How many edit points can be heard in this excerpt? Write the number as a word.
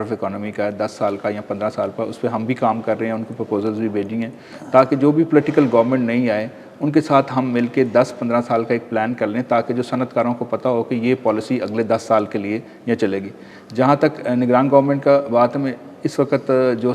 zero